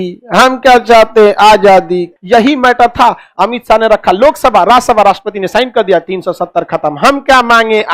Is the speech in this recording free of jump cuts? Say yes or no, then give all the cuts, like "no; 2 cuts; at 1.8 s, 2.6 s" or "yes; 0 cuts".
no; 1 cut; at 2.1 s